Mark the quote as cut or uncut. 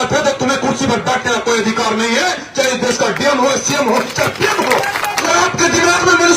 cut